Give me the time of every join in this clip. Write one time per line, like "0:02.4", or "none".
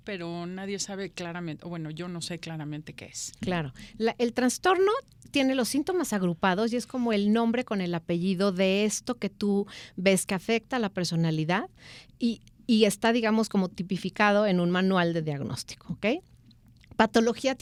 none